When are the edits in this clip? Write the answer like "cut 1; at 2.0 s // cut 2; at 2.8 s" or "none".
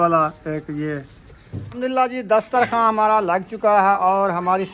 cut 1; at 1.7 s // cut 2; at 3.9 s